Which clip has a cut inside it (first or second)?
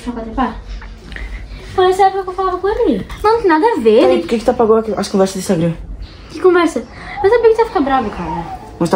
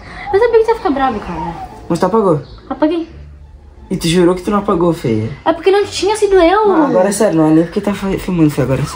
first